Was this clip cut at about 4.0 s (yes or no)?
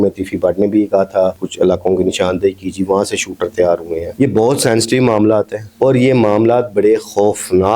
yes